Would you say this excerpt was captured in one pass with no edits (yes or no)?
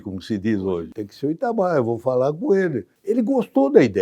no